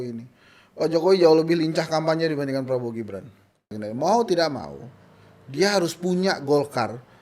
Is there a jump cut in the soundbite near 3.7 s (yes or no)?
yes